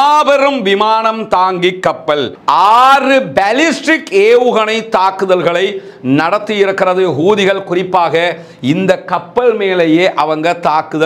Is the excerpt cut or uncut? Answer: cut